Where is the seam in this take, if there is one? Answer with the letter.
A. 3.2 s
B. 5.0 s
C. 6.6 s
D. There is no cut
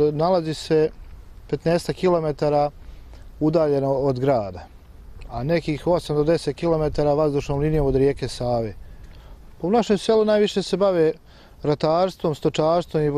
C